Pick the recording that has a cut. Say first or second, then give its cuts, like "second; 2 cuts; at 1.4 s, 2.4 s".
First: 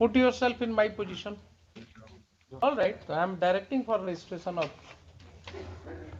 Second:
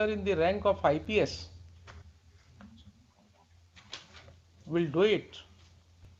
first; 1 cut; at 2.6 s